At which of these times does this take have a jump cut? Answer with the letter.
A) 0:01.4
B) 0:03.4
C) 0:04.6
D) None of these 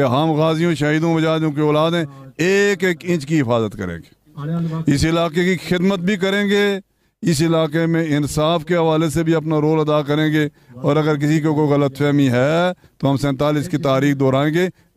D